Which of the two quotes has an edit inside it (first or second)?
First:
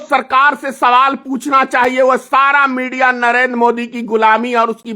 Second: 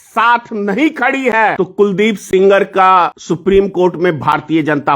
second